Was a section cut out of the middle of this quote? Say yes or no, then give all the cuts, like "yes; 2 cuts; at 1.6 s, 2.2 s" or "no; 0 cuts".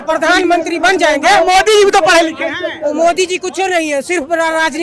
no; 0 cuts